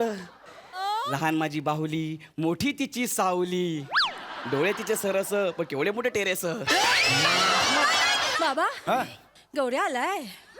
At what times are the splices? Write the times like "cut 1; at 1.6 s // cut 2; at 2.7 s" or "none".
cut 1; at 8.3 s